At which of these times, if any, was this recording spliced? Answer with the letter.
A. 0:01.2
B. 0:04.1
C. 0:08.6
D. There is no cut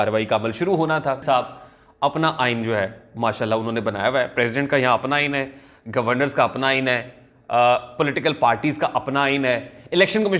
A